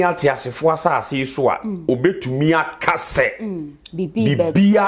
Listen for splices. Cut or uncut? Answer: uncut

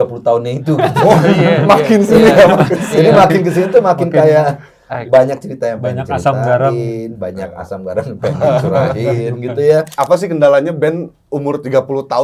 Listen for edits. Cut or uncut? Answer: cut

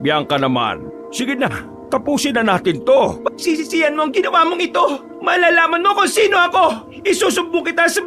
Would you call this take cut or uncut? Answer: cut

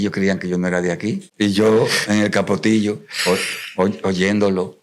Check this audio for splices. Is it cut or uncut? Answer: cut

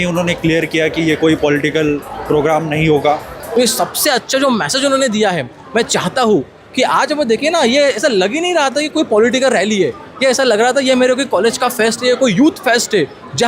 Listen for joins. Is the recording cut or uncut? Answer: cut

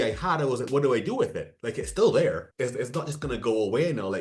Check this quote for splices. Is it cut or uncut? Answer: cut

